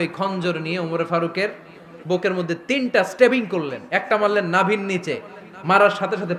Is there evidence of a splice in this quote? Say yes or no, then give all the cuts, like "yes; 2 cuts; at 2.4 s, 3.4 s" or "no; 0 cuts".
no; 0 cuts